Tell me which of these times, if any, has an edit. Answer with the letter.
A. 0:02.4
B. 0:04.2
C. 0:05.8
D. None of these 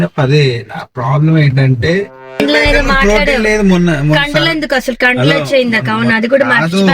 A